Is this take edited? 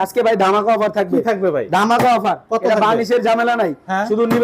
no; 0 cuts

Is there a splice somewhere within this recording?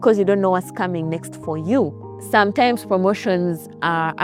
no; 0 cuts

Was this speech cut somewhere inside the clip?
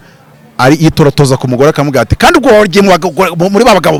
no; 0 cuts

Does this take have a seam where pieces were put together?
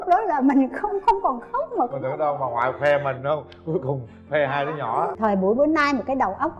yes; 1 cut; at 5.1 s

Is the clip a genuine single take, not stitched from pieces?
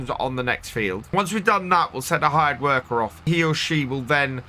no; 2 cuts; at 1.1 s, 3.2 s

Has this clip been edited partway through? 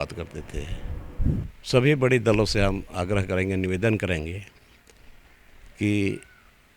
yes; 1 cut; at 1.5 s

